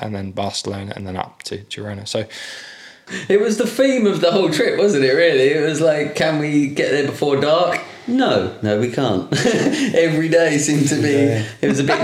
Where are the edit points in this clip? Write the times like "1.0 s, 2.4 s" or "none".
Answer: 3.1 s